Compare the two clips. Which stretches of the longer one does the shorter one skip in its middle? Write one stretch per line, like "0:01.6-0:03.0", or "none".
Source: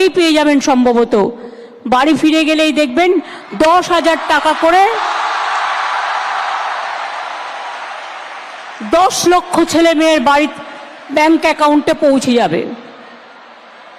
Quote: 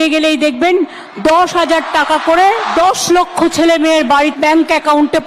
0:05.0-0:08.8
0:10.5-0:11.1